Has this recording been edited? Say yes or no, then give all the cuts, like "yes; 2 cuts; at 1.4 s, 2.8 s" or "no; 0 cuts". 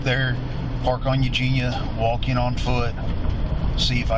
no; 0 cuts